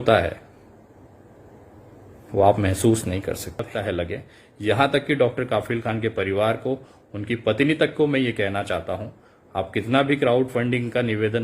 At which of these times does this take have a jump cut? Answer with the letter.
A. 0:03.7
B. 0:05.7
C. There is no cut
A